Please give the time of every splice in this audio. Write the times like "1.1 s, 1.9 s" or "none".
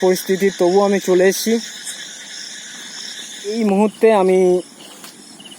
3.5 s